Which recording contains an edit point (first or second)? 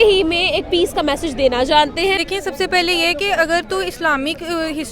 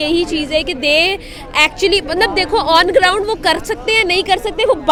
first